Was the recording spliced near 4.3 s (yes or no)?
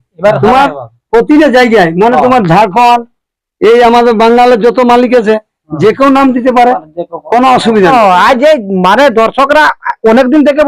no